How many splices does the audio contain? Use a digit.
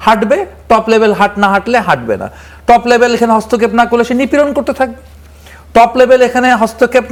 0